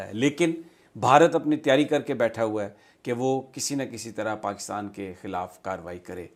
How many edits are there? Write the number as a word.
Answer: zero